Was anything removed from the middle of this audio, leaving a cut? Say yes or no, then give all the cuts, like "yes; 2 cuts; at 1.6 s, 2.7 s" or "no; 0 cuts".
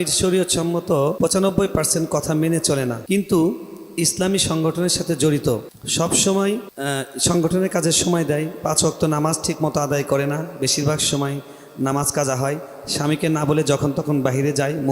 yes; 4 cuts; at 1.2 s, 3.0 s, 5.8 s, 6.7 s